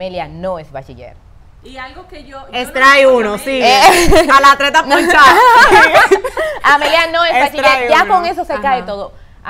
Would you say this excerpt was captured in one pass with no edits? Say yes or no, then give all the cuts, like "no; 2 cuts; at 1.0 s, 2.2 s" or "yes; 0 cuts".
yes; 0 cuts